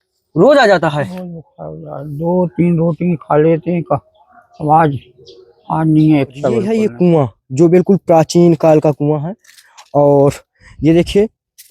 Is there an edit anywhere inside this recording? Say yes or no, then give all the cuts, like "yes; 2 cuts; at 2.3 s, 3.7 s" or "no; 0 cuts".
yes; 1 cut; at 6.7 s